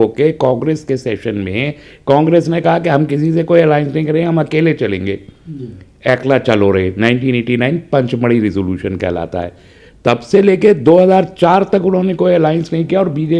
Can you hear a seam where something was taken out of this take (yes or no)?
no